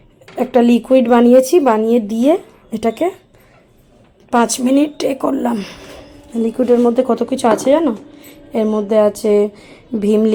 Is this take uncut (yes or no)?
yes